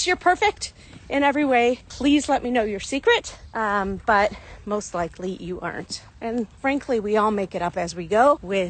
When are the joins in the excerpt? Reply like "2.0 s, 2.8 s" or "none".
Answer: none